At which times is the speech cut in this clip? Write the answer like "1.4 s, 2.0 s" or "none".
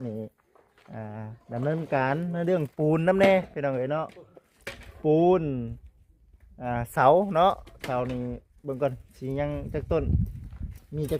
none